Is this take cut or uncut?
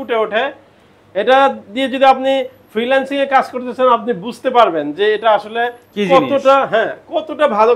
uncut